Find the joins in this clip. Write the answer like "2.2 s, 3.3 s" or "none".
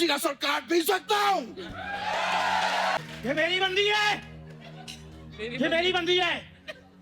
3.0 s